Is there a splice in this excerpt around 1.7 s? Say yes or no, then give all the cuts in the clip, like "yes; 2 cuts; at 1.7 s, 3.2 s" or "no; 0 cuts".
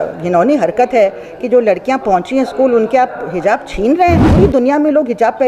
no; 1 cut; at 4.3 s